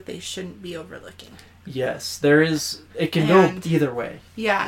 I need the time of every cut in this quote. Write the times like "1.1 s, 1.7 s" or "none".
none